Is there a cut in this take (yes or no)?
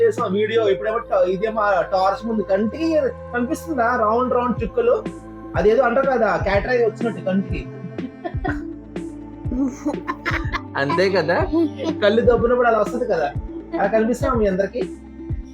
no